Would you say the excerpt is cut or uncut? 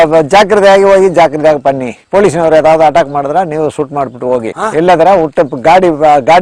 uncut